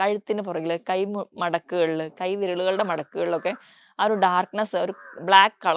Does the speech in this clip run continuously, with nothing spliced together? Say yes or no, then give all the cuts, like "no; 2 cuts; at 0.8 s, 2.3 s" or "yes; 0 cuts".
yes; 0 cuts